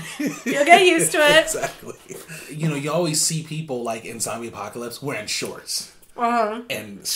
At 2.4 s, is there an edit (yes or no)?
yes